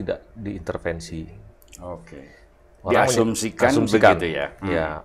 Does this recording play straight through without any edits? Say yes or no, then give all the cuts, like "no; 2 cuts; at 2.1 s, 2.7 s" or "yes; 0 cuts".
yes; 0 cuts